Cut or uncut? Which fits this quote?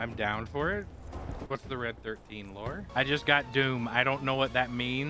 cut